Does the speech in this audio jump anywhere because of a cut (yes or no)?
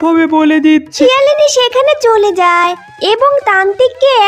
yes